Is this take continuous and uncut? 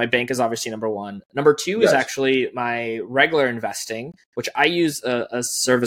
yes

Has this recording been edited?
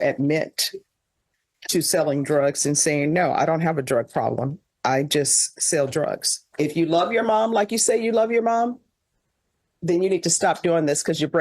yes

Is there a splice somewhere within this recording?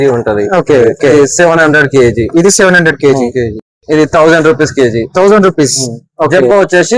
yes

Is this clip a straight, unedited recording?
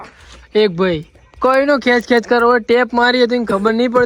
yes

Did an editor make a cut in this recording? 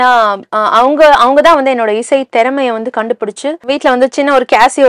yes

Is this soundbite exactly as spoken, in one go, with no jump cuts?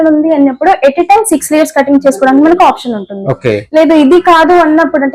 yes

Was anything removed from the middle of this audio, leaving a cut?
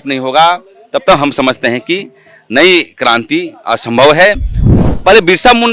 yes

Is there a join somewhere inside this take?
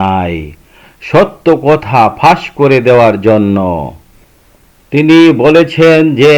no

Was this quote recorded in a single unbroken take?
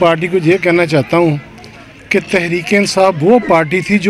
yes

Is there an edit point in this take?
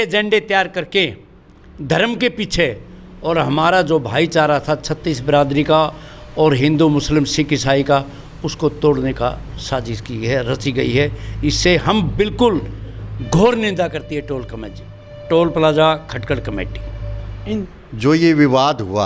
yes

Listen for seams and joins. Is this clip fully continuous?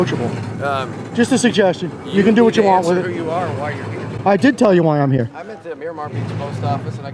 yes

